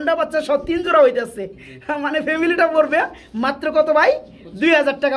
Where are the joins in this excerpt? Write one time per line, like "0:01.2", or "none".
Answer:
none